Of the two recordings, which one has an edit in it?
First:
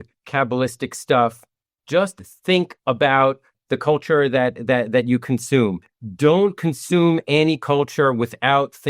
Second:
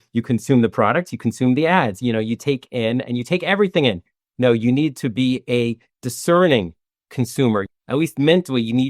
second; 1 cut; at 7.7 s

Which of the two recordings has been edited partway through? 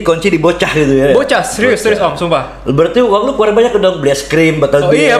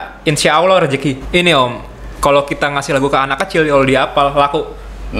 second; 1 cut; at 1.2 s

